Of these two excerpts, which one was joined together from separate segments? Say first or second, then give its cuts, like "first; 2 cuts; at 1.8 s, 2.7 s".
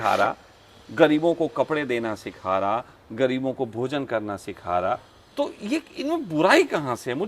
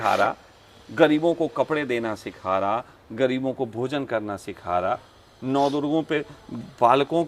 first; 1 cut; at 5.2 s